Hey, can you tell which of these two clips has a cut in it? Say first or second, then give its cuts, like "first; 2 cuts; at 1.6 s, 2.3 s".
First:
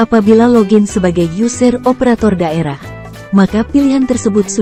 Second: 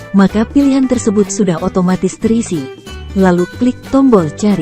second; 1 cut; at 2.8 s